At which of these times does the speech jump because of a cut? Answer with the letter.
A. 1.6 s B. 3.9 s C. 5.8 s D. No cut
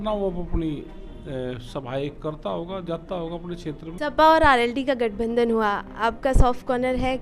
B